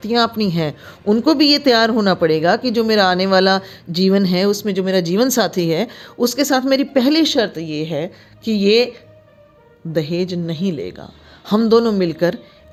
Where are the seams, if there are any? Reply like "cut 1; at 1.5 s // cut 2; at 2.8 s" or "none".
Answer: none